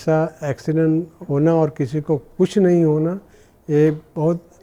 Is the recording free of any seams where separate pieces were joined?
yes; 0 cuts

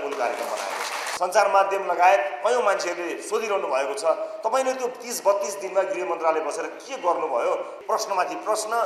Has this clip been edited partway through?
yes; 2 cuts; at 1.0 s, 7.8 s

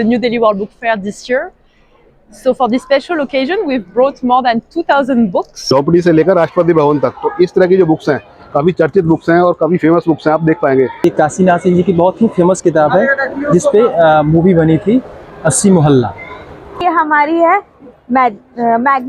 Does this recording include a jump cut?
yes; 3 cuts; at 5.6 s, 11.0 s, 16.8 s

